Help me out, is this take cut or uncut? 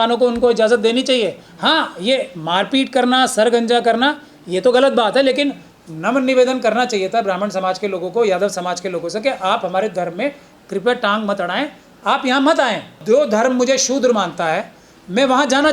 cut